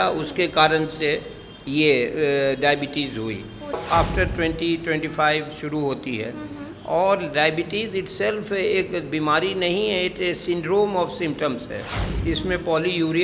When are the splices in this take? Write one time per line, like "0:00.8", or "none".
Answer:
0:03.8